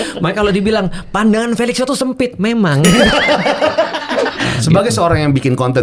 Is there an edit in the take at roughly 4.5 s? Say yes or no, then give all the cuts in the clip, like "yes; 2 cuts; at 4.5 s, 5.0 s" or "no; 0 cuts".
yes; 1 cut; at 4.5 s